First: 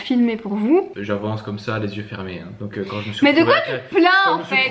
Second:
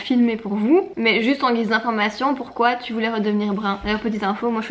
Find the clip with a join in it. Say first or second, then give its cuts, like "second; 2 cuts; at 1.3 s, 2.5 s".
first; 1 cut; at 0.9 s